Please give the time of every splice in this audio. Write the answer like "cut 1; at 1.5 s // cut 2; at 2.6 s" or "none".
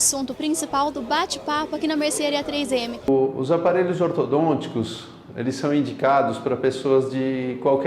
cut 1; at 3.1 s